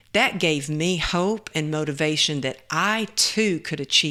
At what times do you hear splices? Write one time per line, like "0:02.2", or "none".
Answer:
none